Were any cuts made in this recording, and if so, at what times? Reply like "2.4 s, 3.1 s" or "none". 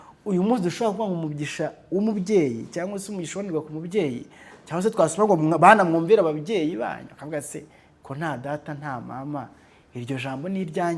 none